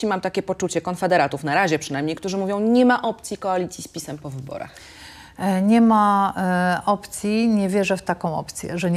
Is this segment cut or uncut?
uncut